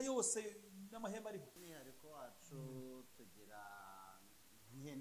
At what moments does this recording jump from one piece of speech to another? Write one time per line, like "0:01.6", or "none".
0:01.7